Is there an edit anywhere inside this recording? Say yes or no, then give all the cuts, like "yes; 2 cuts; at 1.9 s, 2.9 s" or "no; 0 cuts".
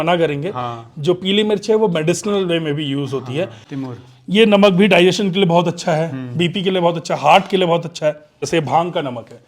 yes; 2 cuts; at 3.7 s, 8.4 s